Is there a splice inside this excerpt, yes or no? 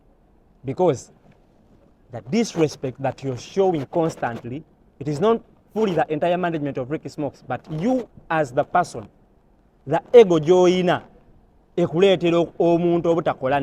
no